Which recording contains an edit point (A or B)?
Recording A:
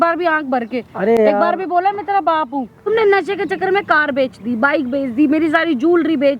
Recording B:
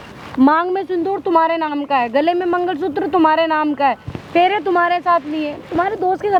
A